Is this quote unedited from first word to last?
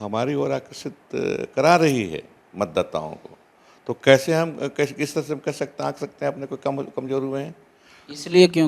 yes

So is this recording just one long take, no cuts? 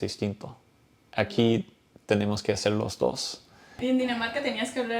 no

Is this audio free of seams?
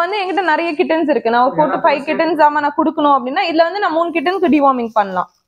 yes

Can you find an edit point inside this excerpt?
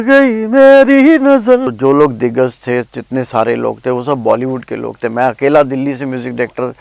yes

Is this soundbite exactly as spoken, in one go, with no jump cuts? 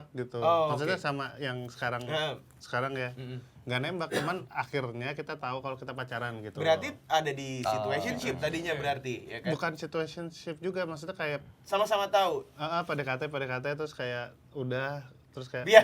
yes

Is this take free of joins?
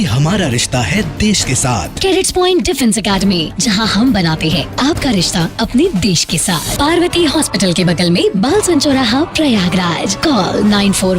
no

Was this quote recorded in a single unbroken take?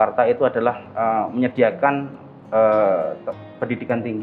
yes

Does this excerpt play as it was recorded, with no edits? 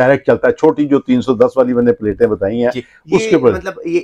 yes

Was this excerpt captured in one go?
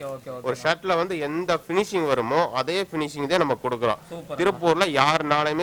yes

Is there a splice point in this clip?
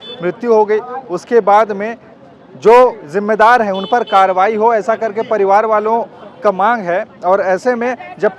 no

